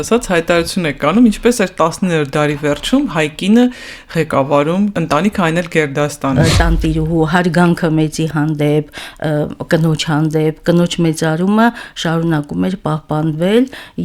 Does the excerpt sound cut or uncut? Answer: cut